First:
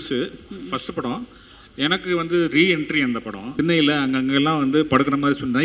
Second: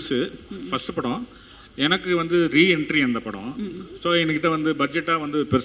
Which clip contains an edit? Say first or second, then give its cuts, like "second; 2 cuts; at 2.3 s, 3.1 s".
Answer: first; 1 cut; at 3.5 s